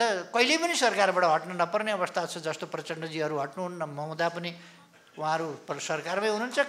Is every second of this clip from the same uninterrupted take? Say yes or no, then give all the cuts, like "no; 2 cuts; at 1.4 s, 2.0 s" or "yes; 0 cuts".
yes; 0 cuts